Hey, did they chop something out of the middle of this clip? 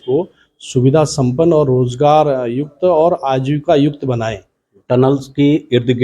yes; 1 cut; at 4.7 s

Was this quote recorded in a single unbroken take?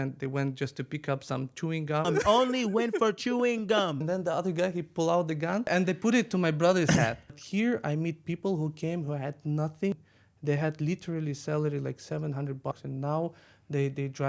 no; 6 cuts; at 2.1 s, 4.0 s, 5.7 s, 7.4 s, 9.9 s, 12.7 s

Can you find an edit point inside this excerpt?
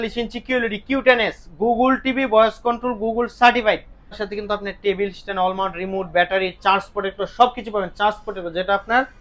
yes; 1 cut; at 4.2 s

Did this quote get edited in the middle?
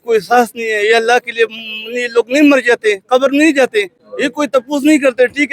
no; 0 cuts

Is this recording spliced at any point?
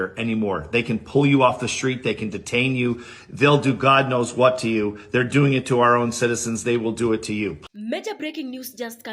yes; 1 cut; at 7.6 s

